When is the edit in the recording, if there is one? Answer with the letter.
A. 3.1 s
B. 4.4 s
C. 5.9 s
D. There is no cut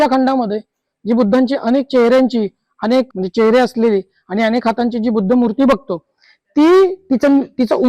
A